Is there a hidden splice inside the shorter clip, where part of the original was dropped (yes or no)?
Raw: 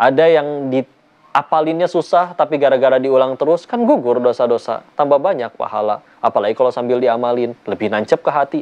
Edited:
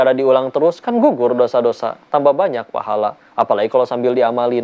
no